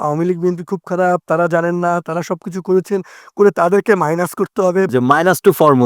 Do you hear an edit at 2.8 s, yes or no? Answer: no